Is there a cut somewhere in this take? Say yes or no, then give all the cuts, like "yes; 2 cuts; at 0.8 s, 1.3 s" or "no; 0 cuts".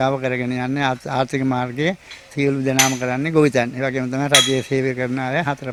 no; 0 cuts